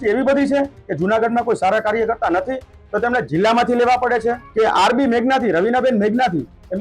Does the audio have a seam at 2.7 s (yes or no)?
no